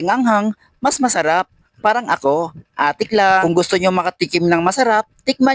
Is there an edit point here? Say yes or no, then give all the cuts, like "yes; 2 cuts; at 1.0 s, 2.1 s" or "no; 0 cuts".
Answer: no; 0 cuts